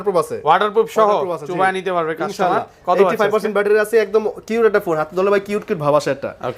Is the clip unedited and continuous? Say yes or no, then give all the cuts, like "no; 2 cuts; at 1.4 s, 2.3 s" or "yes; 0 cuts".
yes; 0 cuts